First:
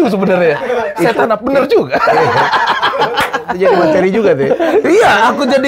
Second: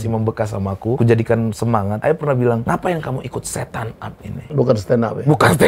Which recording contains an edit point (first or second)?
second